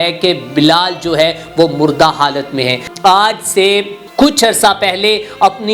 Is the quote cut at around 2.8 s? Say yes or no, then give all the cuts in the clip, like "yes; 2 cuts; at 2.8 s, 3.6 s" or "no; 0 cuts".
yes; 2 cuts; at 2.8 s, 4.0 s